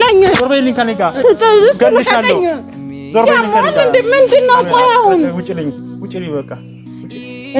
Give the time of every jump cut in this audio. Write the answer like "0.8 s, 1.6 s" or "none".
1.2 s